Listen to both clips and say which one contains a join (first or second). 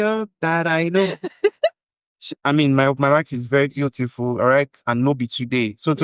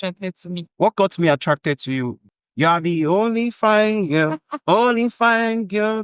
second